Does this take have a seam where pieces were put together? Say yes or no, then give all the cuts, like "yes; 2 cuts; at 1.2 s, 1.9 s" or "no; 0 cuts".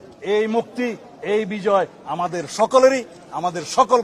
no; 0 cuts